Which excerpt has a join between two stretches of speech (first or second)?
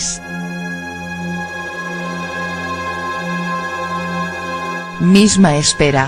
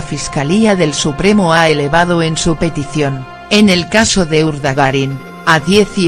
second